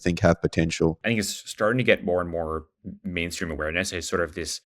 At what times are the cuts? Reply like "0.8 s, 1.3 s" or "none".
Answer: 1.0 s